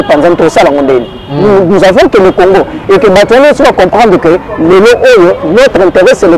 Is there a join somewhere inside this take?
no; 0 cuts

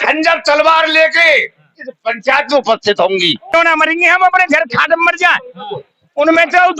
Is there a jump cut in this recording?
yes; 1 cut; at 3.5 s

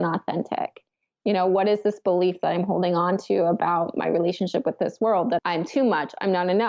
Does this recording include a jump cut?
yes; 1 cut; at 5.4 s

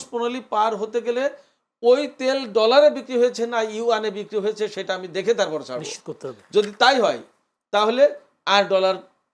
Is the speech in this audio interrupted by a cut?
no; 0 cuts

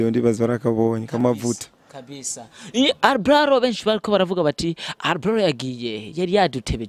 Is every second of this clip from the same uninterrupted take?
yes; 0 cuts

